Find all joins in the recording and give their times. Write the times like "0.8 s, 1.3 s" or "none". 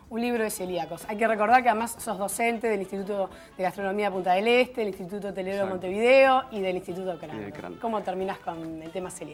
none